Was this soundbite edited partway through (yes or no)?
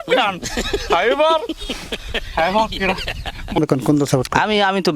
yes